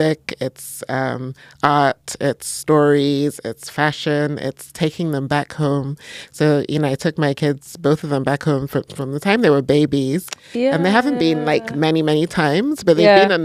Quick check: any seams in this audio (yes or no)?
no